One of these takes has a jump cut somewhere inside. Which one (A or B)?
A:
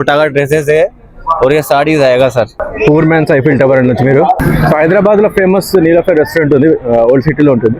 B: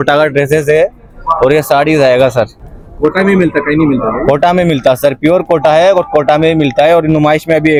A